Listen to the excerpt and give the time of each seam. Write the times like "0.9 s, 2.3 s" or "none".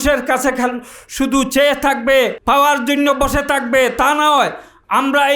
2.4 s